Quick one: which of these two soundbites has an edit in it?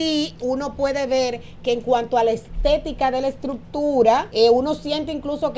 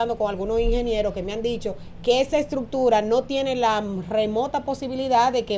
first; 1 cut; at 4.3 s

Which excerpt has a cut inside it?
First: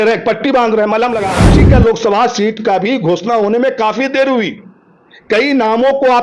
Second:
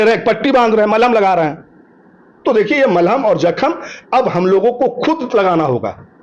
first; 1 cut; at 1.4 s

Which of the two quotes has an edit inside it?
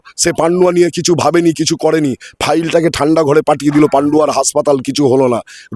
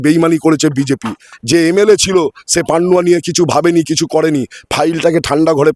second; 1 cut; at 1.3 s

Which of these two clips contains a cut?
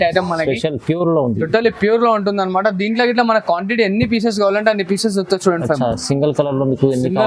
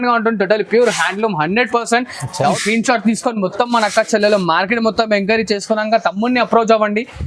second; 1 cut; at 2.6 s

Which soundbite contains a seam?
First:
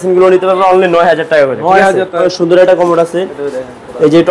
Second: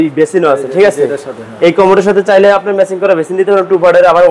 first; 1 cut; at 2.2 s

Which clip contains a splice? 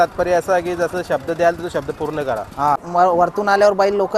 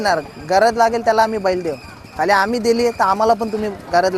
first; 1 cut; at 2.8 s

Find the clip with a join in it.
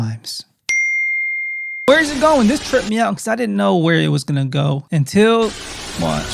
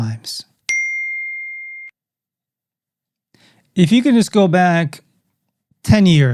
first; 2 cuts; at 1.9 s, 4.8 s

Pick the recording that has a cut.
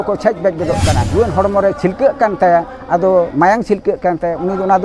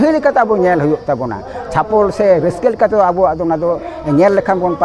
first; 1 cut; at 1.0 s

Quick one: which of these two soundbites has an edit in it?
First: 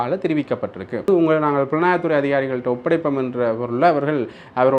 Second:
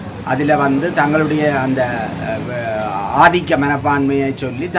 first; 1 cut; at 1.1 s

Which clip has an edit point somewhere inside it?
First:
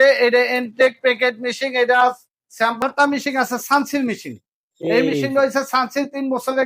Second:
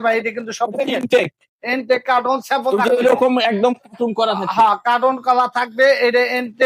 first; 1 cut; at 2.8 s

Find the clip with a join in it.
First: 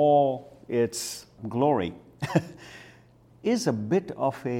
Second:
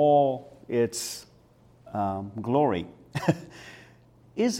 first; 1 cut; at 1.4 s

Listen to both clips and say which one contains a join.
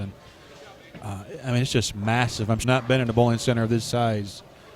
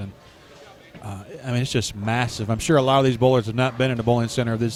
first; 1 cut; at 2.6 s

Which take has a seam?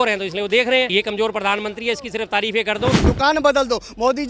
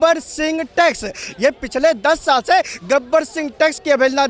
first; 2 cuts; at 0.9 s, 3.0 s

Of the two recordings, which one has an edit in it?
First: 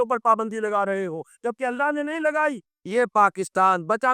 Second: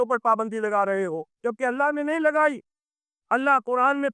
first; 1 cut; at 3.0 s

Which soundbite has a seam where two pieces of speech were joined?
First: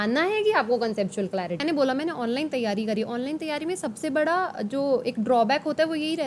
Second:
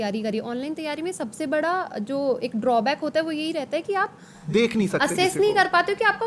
first; 1 cut; at 1.6 s

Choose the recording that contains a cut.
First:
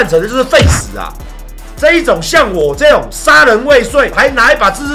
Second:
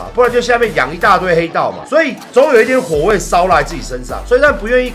first; 1 cut; at 1.7 s

